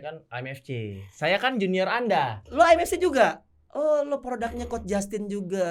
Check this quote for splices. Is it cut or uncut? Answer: uncut